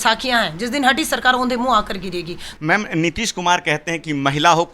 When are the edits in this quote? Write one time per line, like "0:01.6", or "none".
0:02.4